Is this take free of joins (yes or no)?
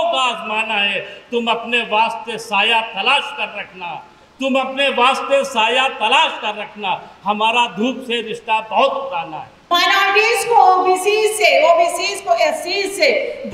no